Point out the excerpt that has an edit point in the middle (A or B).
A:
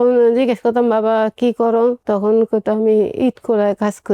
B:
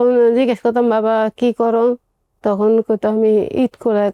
A